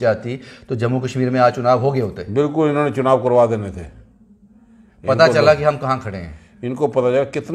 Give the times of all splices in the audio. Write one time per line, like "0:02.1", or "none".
none